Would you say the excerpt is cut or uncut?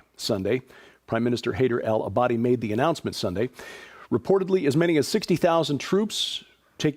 uncut